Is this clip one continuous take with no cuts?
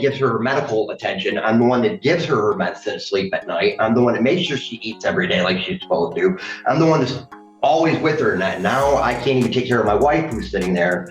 yes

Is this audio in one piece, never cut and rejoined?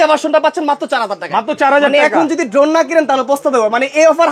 yes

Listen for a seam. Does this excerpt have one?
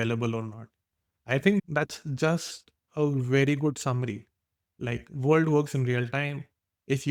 no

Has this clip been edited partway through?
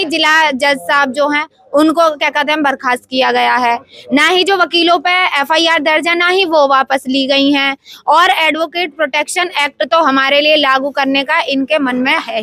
no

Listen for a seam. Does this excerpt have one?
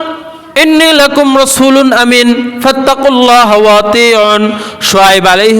no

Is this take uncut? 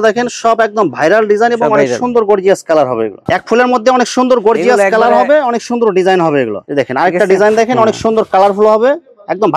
no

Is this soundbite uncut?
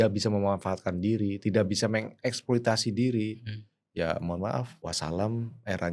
no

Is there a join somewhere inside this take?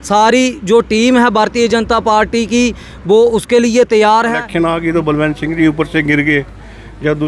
yes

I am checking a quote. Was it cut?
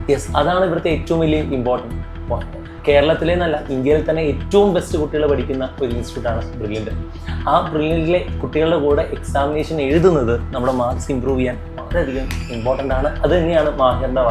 yes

